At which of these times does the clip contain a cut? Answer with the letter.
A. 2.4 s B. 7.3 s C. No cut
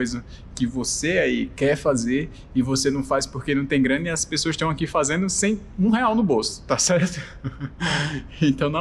C